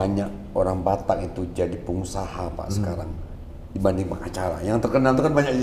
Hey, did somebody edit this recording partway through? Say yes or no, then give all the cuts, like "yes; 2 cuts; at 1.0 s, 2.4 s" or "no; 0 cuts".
no; 0 cuts